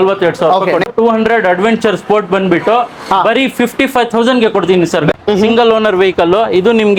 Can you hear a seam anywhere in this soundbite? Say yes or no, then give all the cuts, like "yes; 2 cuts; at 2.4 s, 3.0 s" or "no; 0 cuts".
yes; 2 cuts; at 0.9 s, 5.1 s